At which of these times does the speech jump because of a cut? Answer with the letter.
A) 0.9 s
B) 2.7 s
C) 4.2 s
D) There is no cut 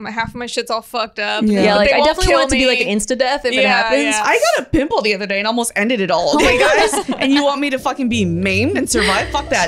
C